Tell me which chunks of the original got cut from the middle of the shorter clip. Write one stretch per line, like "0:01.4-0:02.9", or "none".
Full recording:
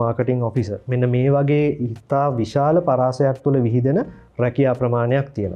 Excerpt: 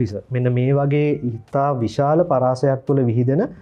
none